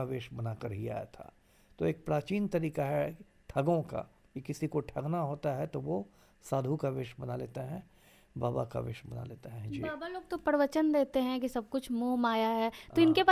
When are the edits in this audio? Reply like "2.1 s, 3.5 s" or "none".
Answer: none